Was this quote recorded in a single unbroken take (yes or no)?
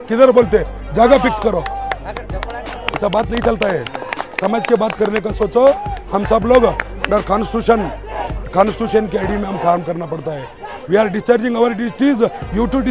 yes